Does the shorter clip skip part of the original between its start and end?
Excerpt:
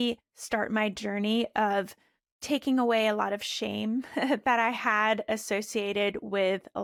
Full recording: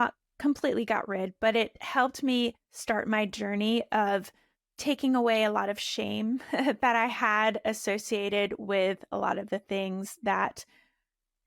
no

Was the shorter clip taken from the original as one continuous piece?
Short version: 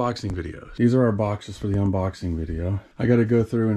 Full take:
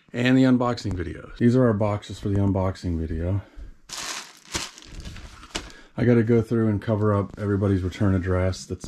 no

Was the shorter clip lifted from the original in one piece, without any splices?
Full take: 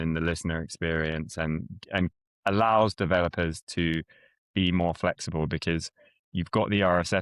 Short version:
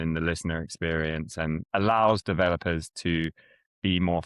no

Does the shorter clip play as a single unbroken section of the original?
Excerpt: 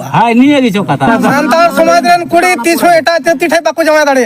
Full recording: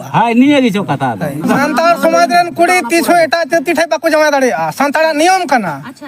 no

